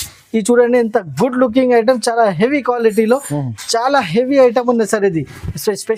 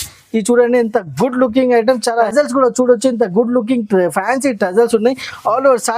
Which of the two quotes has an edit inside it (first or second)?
second